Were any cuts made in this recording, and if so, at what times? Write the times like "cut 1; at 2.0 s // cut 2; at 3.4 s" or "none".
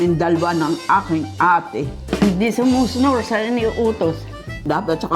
cut 1; at 2.0 s